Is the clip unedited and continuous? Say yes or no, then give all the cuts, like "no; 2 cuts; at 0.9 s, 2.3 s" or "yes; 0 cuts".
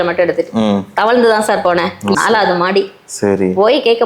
no; 1 cut; at 2.1 s